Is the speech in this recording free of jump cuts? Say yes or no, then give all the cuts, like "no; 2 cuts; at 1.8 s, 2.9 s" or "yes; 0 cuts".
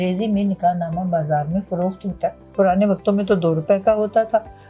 yes; 0 cuts